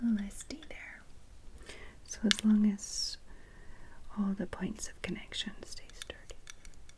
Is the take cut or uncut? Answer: uncut